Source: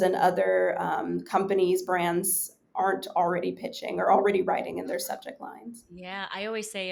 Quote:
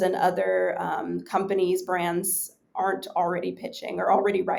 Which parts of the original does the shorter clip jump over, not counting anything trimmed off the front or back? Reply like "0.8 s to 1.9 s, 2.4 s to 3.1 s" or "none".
none